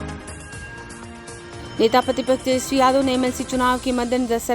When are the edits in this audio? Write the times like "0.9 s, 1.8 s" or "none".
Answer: 1.5 s

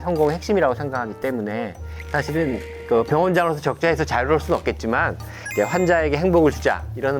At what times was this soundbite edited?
1.9 s

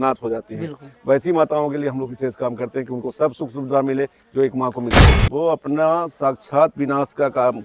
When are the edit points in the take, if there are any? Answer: 5.2 s

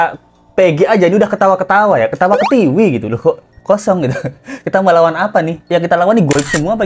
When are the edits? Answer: 5.6 s

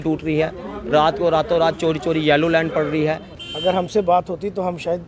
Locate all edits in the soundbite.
3.3 s

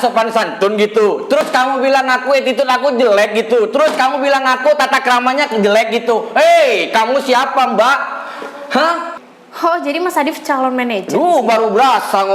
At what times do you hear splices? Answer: 9.2 s

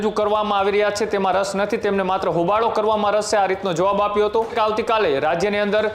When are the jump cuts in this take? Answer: 4.5 s

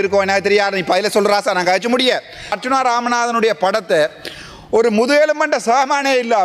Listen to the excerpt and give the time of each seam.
2.6 s

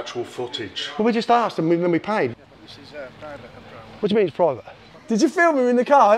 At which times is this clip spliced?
2.4 s

